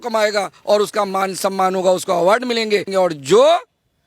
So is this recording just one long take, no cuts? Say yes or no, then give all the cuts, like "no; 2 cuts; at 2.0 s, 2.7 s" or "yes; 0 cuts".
no; 1 cut; at 2.9 s